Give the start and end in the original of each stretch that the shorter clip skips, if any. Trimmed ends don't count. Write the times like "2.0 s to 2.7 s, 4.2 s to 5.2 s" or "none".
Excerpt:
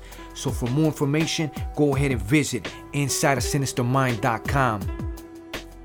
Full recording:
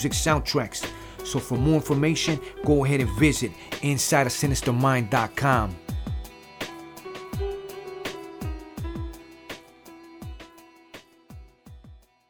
5.8 s to 8.9 s

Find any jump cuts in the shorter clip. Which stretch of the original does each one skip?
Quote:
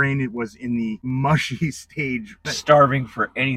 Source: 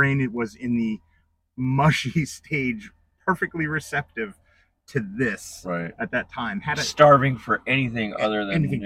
1.0 s to 1.5 s, 3.0 s to 6.8 s

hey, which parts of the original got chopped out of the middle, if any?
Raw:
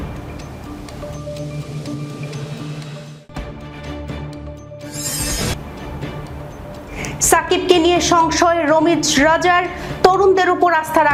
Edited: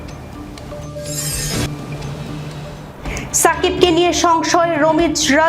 3.7 s to 7.3 s

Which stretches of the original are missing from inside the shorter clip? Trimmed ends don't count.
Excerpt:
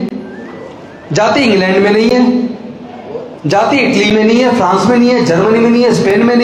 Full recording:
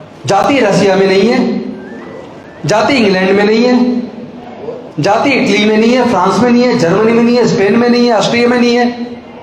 none

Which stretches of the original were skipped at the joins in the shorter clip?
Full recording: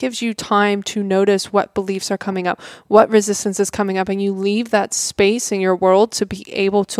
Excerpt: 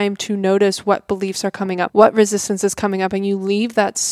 2.5 s to 2.8 s

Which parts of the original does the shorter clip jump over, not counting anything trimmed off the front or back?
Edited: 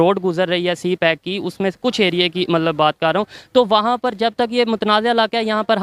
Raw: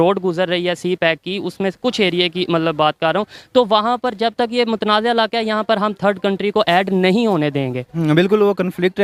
none

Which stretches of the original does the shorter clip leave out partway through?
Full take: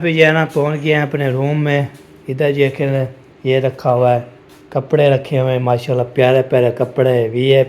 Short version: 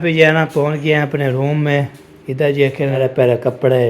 3.0 s to 6.3 s

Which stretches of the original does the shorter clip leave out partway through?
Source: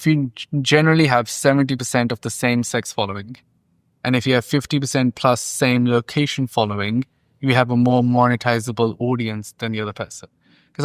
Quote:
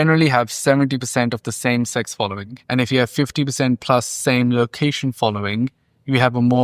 3.3 s to 3.8 s

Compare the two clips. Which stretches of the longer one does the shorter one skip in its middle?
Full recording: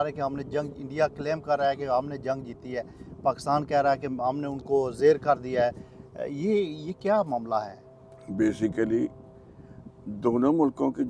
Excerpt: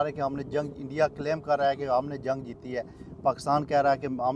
none

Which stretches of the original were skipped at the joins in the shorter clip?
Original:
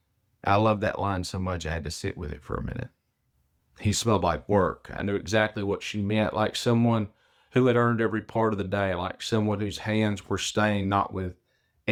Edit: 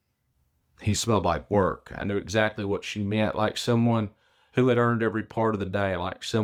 none

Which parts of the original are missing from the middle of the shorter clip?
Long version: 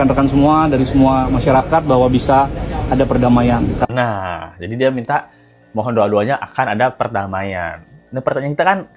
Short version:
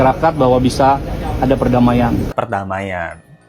3.8 s to 6.9 s

